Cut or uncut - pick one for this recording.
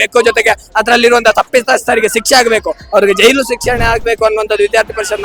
uncut